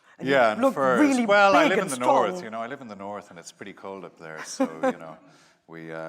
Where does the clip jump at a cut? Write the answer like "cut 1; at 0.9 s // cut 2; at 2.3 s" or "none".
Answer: cut 1; at 2.4 s